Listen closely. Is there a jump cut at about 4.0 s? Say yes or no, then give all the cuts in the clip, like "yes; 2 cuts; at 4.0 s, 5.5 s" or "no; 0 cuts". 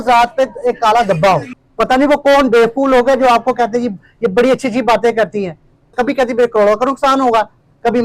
no; 2 cuts; at 1.6 s, 5.9 s